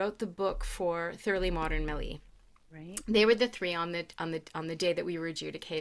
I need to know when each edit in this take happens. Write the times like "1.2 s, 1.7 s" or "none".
none